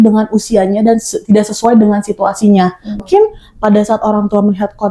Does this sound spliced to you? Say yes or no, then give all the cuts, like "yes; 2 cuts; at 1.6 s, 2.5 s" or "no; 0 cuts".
yes; 1 cut; at 3.0 s